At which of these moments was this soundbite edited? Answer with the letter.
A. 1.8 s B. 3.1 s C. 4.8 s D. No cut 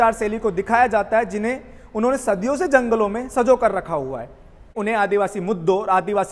C